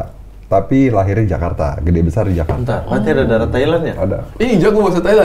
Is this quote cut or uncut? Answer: uncut